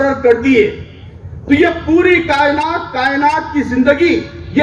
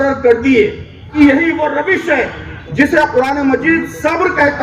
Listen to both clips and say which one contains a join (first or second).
second